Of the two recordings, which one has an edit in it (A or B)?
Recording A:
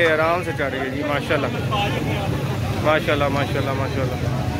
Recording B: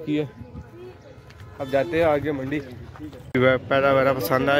B